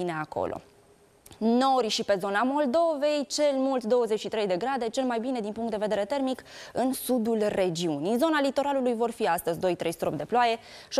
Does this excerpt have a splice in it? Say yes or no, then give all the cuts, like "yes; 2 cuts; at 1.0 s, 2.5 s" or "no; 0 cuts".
yes; 1 cut; at 8.4 s